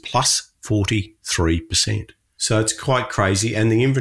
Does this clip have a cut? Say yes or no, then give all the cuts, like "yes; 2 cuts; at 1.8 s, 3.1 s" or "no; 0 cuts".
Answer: yes; 1 cut; at 2.5 s